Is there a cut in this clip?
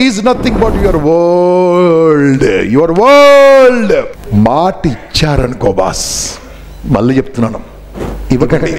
yes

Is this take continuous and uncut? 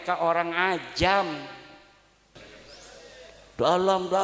no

